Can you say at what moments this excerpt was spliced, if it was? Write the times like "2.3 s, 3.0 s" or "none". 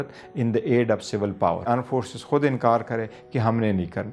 1.7 s